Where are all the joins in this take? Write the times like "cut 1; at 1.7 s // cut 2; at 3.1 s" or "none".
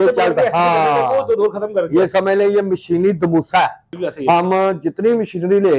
cut 1; at 3.9 s